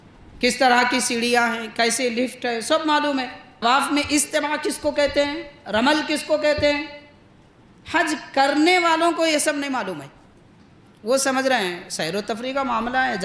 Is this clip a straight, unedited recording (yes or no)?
no